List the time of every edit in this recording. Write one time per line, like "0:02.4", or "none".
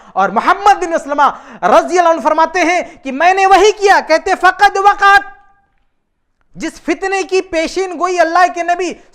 none